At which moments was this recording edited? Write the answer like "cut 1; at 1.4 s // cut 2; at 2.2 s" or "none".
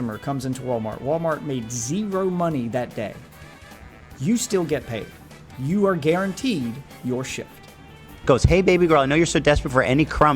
cut 1; at 8.2 s